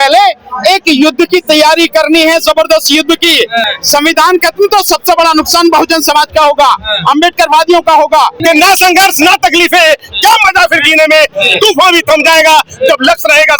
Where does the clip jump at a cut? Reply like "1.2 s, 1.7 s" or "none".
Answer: 3.7 s, 8.4 s